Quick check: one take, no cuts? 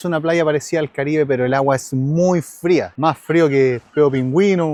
yes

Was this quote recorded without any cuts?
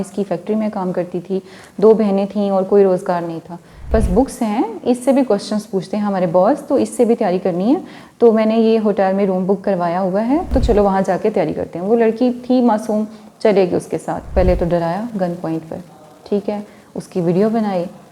no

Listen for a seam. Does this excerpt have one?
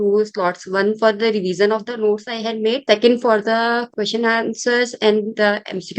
yes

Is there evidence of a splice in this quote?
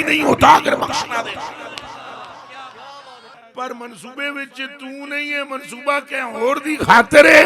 yes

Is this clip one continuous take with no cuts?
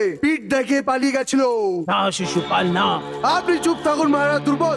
yes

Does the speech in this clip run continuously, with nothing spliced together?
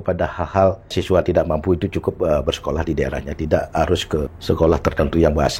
no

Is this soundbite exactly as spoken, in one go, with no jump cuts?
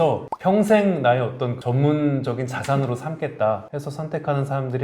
no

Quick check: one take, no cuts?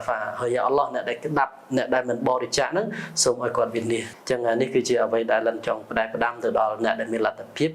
no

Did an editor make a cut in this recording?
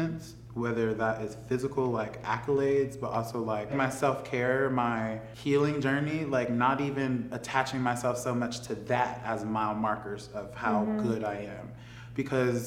yes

